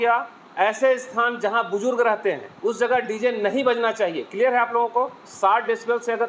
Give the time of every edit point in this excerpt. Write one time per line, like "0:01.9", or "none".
0:02.5
0:05.2

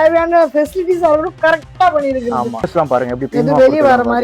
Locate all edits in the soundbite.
0:02.6

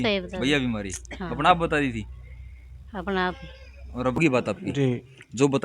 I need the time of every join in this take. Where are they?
0:04.2

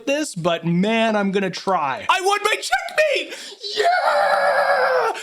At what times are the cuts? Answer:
0:02.0

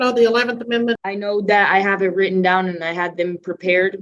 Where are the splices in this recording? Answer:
0:01.0

